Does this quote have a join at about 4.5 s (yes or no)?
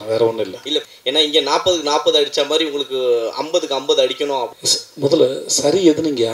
yes